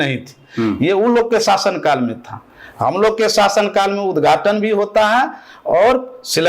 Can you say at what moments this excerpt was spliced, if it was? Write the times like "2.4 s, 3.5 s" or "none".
none